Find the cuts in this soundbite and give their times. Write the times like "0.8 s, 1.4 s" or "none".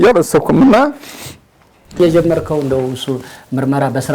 2.0 s